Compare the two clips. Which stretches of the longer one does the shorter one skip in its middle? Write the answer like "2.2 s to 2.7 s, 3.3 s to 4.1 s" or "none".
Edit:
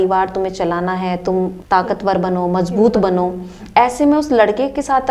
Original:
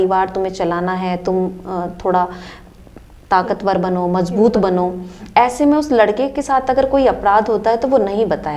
1.6 s to 3.2 s